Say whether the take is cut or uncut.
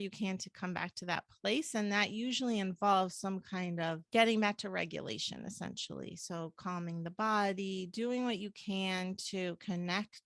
cut